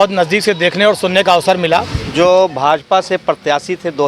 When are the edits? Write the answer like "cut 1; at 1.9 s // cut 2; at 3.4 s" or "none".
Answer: cut 1; at 2.0 s